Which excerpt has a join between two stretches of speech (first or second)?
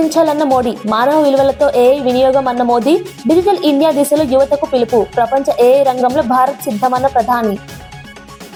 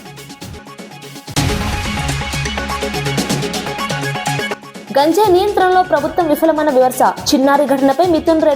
second